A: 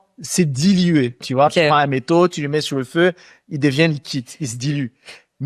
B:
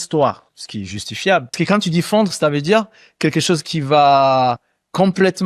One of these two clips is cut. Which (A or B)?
B